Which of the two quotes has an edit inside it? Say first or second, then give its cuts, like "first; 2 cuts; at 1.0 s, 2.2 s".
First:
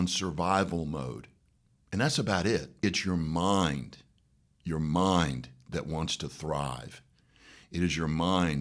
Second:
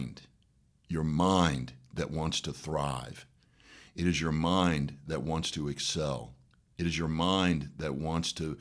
first; 1 cut; at 2.8 s